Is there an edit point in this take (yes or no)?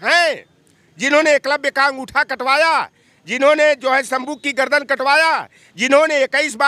no